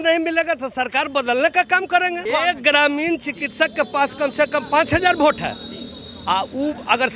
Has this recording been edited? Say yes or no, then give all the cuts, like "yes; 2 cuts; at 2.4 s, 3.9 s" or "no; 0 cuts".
yes; 1 cut; at 2.2 s